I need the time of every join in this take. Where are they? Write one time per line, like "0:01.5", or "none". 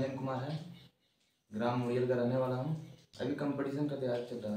0:03.1